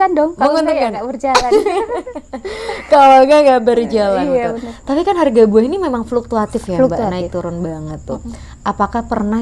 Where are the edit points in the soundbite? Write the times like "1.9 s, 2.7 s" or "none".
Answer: none